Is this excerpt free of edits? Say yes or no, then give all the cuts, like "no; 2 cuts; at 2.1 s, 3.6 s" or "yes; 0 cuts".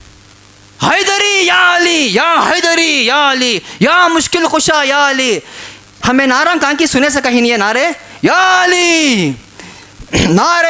no; 1 cut; at 5.9 s